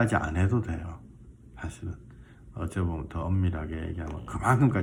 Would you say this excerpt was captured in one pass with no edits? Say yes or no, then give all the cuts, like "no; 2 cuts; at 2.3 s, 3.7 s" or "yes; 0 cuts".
yes; 0 cuts